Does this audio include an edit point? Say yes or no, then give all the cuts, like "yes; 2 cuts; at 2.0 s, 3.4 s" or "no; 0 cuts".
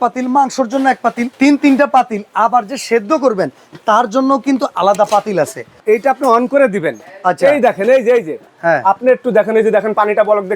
yes; 3 cuts; at 1.3 s, 5.8 s, 8.5 s